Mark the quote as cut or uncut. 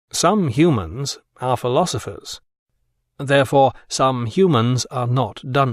uncut